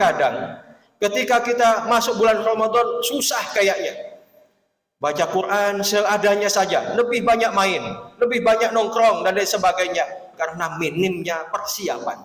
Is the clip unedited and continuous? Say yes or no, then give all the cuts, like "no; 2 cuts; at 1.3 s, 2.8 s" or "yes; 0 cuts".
yes; 0 cuts